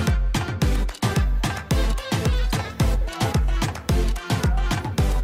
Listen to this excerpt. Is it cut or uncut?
uncut